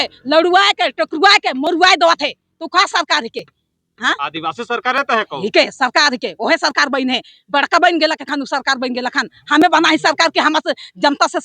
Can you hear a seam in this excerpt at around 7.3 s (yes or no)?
no